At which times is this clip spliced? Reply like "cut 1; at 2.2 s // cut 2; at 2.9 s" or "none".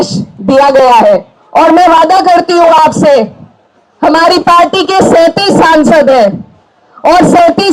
cut 1; at 1.4 s